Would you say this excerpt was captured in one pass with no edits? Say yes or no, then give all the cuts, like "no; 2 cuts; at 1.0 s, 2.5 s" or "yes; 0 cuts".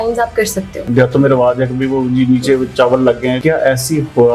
no; 2 cuts; at 0.8 s, 3.4 s